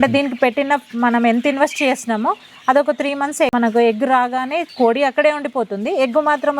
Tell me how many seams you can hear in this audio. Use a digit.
2